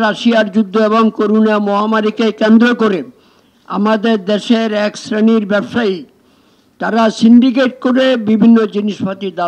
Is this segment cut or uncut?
uncut